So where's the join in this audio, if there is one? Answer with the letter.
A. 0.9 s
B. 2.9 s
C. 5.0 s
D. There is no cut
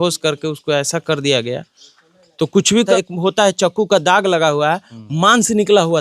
B